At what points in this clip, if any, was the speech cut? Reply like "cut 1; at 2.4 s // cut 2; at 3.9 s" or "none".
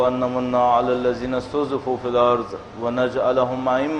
none